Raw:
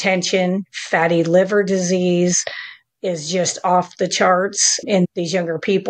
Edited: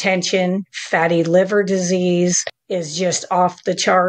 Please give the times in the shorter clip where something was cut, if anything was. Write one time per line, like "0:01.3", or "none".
0:02.5